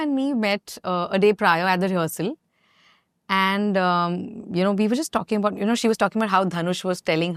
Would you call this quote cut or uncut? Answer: uncut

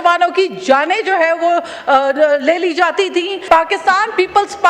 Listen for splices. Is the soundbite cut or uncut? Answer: cut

